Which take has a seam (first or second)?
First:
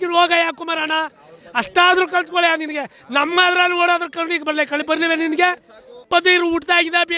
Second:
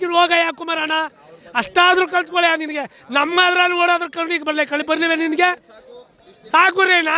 first